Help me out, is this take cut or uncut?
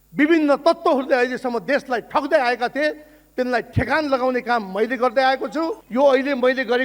cut